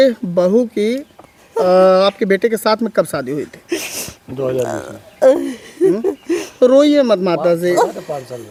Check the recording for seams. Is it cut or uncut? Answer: uncut